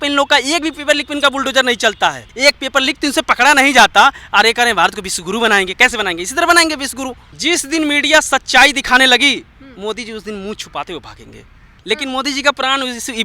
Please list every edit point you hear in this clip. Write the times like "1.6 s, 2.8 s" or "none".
2.3 s, 7.2 s, 11.7 s